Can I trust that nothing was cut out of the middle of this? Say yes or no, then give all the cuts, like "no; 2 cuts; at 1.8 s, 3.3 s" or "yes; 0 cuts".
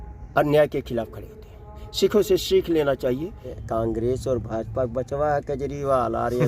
no; 1 cut; at 3.6 s